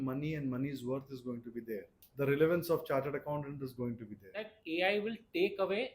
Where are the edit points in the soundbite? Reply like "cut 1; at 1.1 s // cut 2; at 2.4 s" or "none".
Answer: cut 1; at 2.0 s // cut 2; at 4.5 s

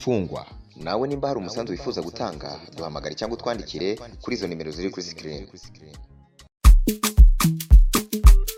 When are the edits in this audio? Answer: none

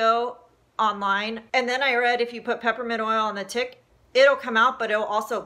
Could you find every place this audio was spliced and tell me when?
cut 1; at 1.4 s

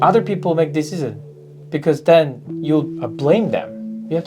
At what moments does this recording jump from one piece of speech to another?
cut 1; at 3.0 s

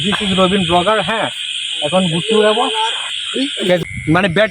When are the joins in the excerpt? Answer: cut 1; at 3.6 s

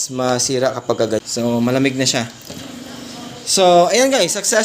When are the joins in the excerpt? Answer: cut 1; at 1.2 s

